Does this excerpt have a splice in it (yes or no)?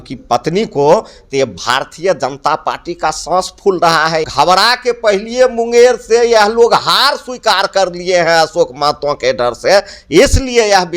yes